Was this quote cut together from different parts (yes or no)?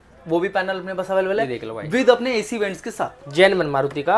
no